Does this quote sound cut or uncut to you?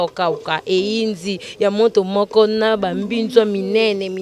uncut